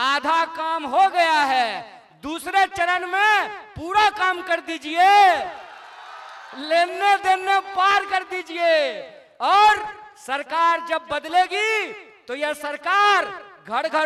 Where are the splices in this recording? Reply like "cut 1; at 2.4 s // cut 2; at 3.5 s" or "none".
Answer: none